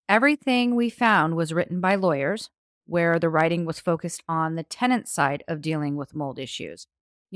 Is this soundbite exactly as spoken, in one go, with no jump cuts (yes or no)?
yes